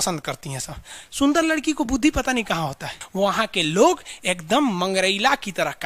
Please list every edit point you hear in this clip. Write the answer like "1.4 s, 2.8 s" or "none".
3.0 s